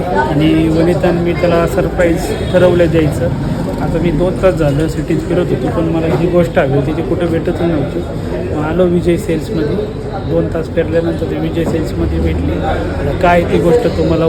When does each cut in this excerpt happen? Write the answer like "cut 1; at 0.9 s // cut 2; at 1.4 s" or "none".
none